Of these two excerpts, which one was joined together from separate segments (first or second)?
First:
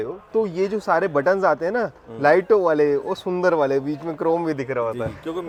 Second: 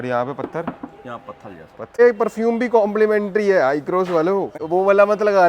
second